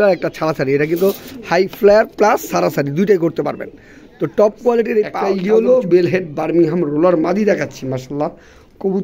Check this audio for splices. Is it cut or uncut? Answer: cut